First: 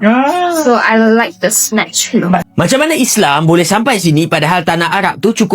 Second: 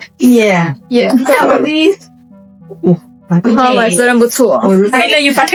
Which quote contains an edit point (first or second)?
first